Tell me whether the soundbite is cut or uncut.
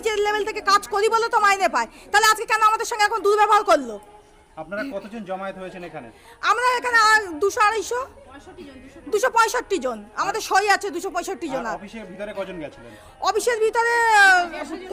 uncut